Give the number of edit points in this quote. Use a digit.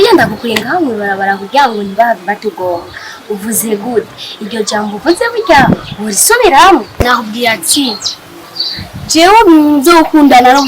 1